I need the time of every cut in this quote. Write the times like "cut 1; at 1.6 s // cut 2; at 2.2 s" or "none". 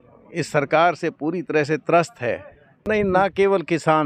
cut 1; at 2.9 s